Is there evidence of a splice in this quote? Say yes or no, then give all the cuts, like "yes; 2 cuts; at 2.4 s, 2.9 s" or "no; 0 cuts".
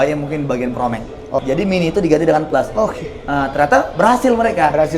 yes; 1 cut; at 1.4 s